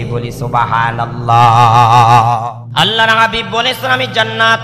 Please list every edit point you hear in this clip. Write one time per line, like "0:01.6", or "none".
0:02.4